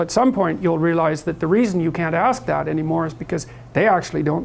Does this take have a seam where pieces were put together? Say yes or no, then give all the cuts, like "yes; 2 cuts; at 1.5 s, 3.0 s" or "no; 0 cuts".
yes; 1 cut; at 2.8 s